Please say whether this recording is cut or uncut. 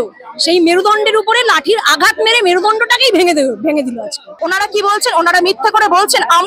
cut